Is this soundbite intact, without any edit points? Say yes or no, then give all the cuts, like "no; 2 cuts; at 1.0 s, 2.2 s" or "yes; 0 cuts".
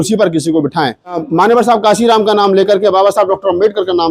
no; 1 cut; at 1.2 s